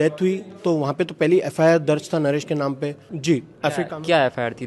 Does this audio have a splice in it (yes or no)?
yes